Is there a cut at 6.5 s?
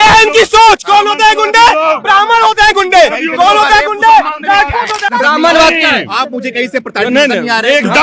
no; 1 cut; at 5.0 s

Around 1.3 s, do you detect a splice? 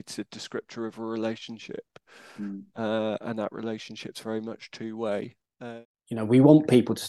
no; 1 cut; at 5.7 s

